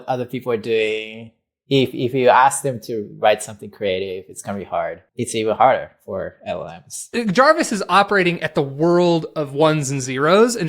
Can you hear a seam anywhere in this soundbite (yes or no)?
yes